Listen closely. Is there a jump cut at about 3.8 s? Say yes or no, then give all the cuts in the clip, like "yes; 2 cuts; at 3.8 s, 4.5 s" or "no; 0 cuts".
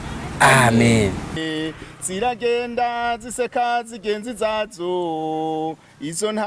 no; 1 cut; at 1.4 s